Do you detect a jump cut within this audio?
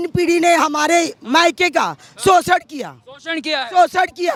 no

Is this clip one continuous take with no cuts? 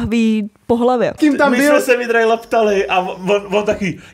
no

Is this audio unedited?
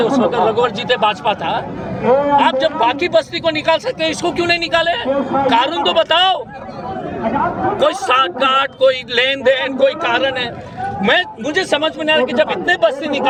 yes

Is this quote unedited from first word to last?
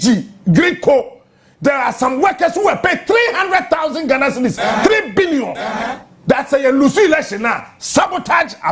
yes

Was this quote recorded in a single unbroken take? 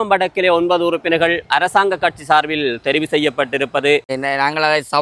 no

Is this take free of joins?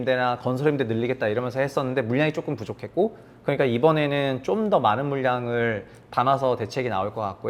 yes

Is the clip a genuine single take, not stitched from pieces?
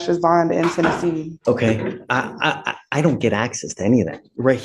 no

